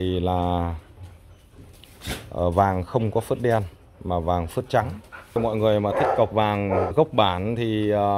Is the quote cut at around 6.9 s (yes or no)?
yes